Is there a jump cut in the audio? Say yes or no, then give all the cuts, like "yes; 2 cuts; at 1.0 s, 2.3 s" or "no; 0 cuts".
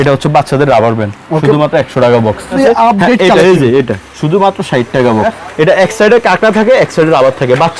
yes; 2 cuts; at 2.6 s, 5.4 s